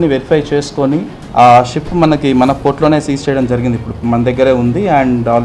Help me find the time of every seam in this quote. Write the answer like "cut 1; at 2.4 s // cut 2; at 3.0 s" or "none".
cut 1; at 1.2 s